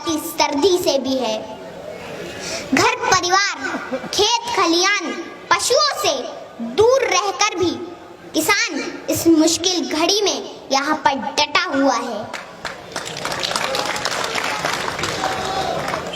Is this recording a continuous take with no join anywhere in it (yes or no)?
yes